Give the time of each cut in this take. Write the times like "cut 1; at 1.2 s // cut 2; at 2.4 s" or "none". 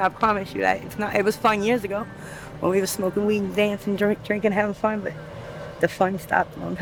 none